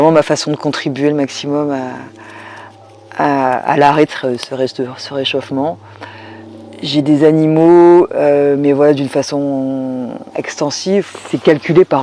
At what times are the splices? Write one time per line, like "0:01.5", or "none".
0:11.1